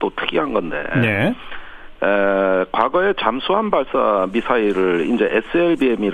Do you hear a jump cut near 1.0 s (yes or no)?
no